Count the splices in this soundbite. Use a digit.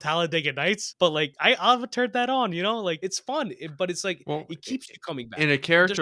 2